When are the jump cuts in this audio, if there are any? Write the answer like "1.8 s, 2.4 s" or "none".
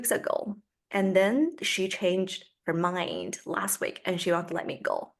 none